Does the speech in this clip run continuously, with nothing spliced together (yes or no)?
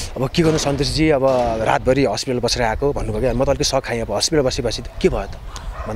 yes